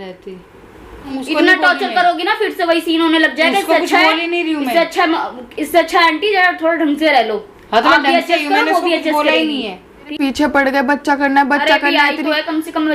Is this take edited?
yes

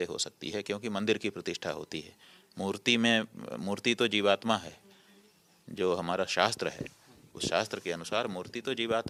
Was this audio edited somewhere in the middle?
no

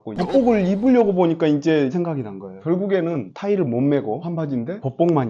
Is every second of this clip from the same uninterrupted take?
yes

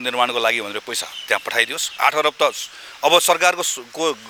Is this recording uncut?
yes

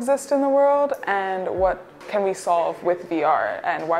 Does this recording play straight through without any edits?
no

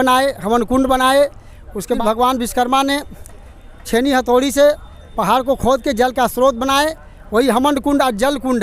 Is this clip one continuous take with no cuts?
no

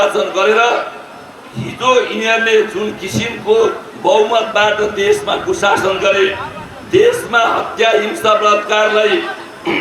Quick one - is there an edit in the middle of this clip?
no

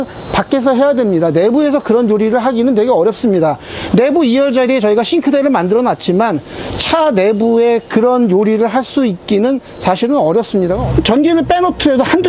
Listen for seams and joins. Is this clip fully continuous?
no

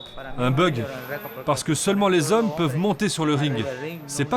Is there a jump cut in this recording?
no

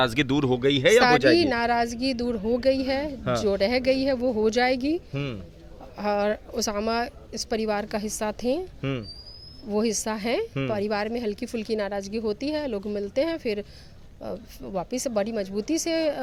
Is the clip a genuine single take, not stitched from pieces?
yes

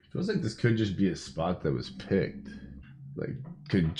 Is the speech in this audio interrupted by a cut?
no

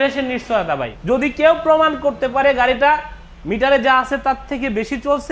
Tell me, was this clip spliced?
yes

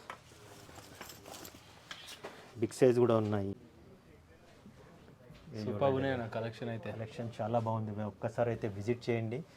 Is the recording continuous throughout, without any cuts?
no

